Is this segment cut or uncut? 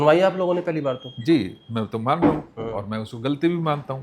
uncut